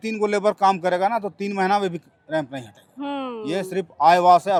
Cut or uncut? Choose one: uncut